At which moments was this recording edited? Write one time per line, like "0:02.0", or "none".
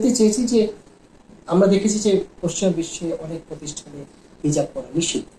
none